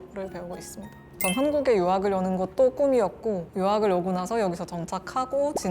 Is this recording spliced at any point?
yes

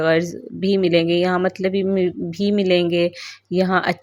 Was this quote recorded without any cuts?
yes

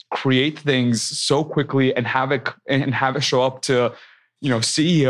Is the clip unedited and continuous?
yes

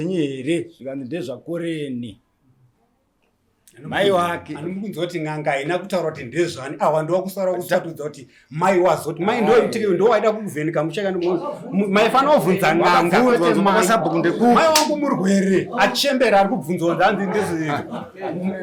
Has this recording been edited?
no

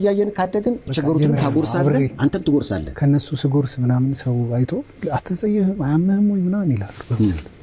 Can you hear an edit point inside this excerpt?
yes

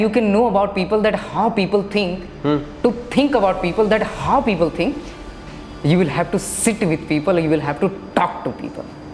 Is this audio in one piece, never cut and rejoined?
yes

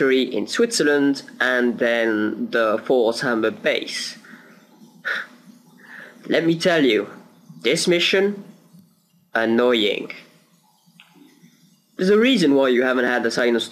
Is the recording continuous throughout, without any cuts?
no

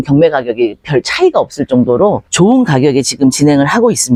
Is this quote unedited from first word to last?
yes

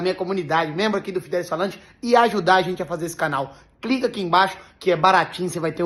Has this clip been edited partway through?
no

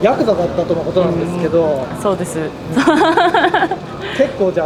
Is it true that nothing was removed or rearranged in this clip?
yes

